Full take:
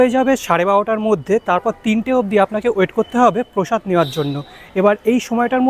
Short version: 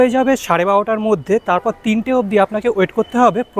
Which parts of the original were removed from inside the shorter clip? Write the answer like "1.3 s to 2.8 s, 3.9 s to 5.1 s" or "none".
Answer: none